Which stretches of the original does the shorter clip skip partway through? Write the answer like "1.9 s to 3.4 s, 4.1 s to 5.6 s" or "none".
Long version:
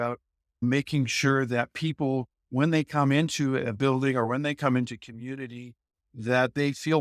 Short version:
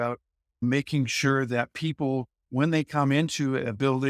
none